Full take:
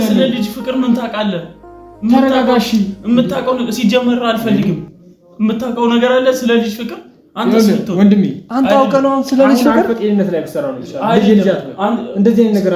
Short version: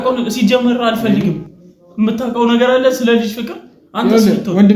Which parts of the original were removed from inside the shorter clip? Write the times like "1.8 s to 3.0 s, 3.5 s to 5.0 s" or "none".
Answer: none